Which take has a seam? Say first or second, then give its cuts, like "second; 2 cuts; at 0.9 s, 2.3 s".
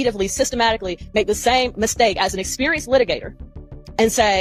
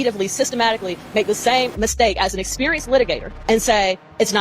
second; 1 cut; at 3.3 s